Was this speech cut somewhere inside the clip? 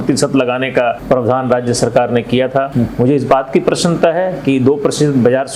yes; 2 cuts; at 1.0 s, 2.7 s

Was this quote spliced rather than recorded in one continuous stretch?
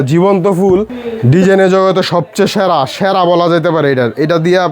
yes; 1 cut; at 0.9 s

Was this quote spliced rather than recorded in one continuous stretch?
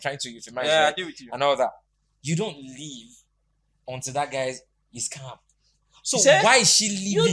no; 0 cuts

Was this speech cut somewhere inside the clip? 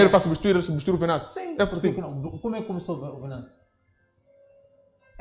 no; 0 cuts

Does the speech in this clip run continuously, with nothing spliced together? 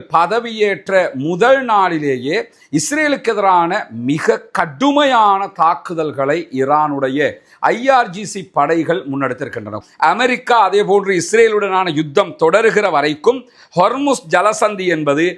no; 1 cut; at 9.8 s

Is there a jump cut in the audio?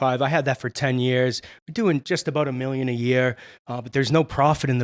no; 0 cuts

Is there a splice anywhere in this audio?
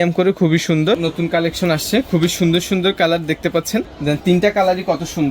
yes; 2 cuts; at 1.0 s, 3.9 s

